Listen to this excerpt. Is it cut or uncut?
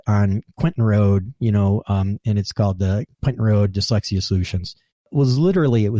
cut